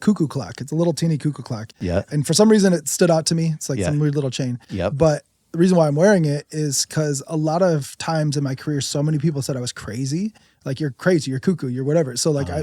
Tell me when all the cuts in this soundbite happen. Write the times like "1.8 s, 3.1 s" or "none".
none